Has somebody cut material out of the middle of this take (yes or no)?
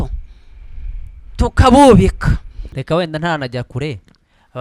yes